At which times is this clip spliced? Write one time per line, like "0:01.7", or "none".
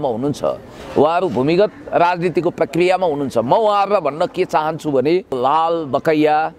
0:05.4